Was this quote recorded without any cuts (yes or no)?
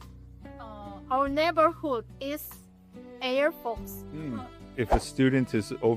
no